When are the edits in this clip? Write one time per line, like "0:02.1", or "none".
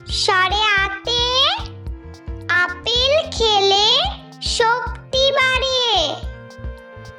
0:06.2